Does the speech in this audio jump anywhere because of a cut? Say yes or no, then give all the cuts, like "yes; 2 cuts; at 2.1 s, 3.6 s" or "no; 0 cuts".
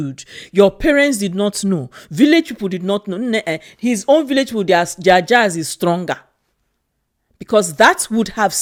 no; 0 cuts